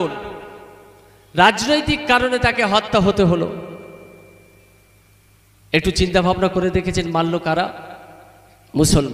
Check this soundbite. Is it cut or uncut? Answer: uncut